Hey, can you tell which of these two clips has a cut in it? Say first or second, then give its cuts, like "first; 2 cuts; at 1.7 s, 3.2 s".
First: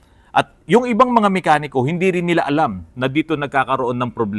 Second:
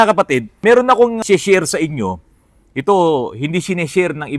second; 1 cut; at 1.0 s